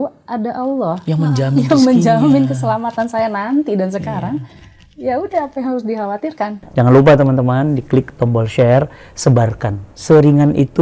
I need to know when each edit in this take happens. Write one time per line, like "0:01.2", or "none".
0:06.6